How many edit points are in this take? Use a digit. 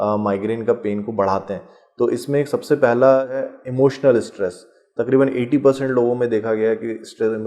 1